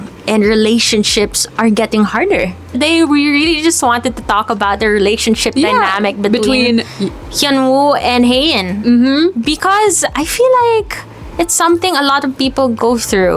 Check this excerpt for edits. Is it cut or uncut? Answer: cut